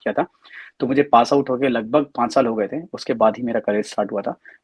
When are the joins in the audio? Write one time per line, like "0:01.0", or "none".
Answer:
none